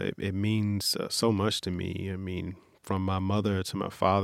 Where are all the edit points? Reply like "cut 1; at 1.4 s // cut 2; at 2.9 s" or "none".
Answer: none